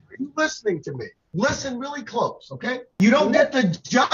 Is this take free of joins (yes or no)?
no